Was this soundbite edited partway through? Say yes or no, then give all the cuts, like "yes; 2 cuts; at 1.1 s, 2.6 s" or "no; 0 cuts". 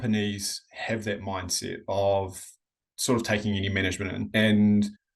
yes; 1 cut; at 4.2 s